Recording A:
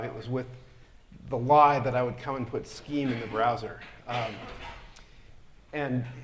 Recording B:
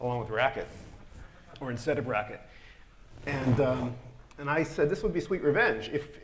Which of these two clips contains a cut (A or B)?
A